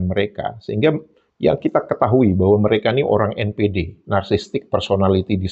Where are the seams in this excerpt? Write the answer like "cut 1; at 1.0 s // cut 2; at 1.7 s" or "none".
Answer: none

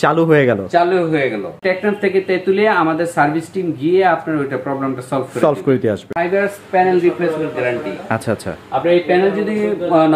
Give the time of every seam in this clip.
cut 1; at 1.6 s // cut 2; at 6.1 s

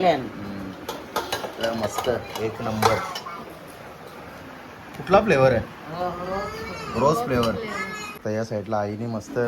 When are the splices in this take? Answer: cut 1; at 8.1 s

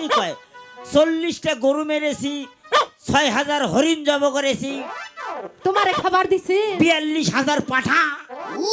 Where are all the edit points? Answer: none

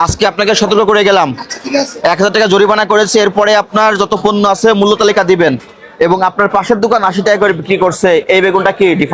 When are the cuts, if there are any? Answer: none

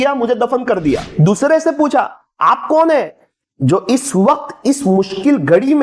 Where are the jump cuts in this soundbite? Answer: cut 1; at 1.1 s

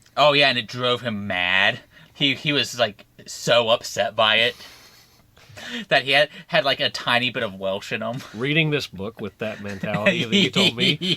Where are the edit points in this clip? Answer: cut 1; at 1.9 s

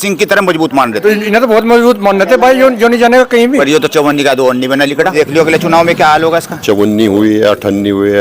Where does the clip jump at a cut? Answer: cut 1; at 1.0 s // cut 2; at 3.6 s // cut 3; at 5.1 s // cut 4; at 6.5 s

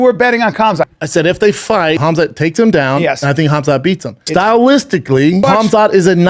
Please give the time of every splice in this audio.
cut 1; at 0.9 s // cut 2; at 2.0 s // cut 3; at 4.1 s // cut 4; at 5.4 s

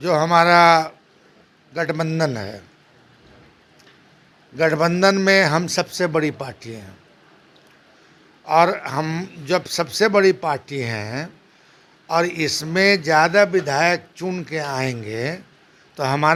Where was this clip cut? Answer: none

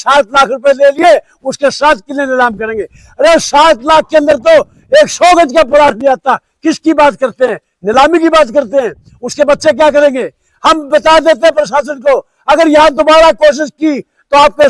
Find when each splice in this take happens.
none

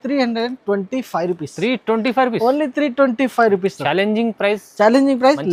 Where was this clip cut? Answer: none

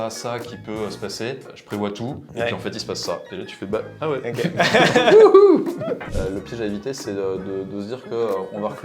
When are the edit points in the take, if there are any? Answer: cut 1; at 6.1 s

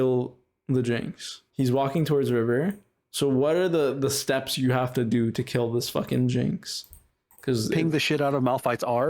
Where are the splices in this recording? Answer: cut 1; at 1.4 s

